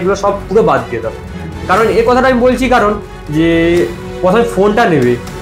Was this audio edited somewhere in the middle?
no; 0 cuts

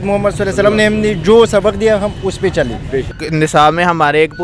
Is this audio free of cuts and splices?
no; 1 cut; at 3.1 s

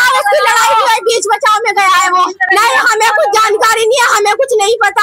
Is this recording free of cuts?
no; 1 cut; at 2.5 s

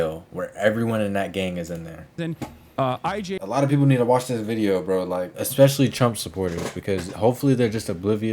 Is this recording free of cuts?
no; 1 cut; at 3.4 s

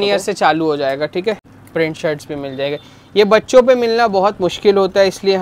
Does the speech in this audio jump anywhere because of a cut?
yes; 1 cut; at 1.5 s

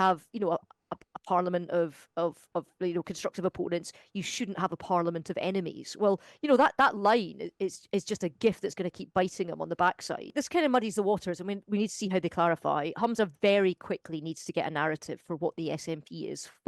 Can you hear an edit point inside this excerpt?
yes; 1 cut; at 10.3 s

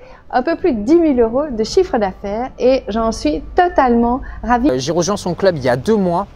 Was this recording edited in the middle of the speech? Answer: yes; 1 cut; at 4.7 s

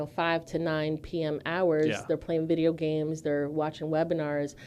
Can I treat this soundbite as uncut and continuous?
yes; 0 cuts

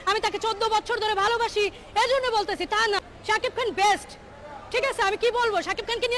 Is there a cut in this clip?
no; 0 cuts

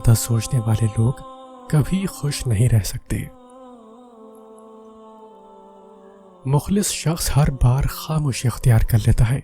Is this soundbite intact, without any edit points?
no; 2 cuts; at 3.3 s, 6.4 s

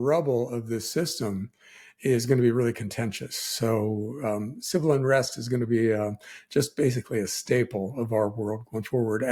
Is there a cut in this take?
no; 0 cuts

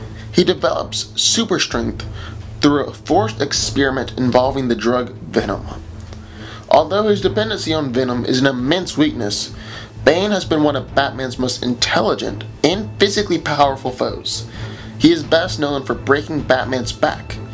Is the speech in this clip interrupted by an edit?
yes; 1 cut; at 10.5 s

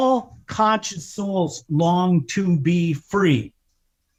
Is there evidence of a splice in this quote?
no; 0 cuts

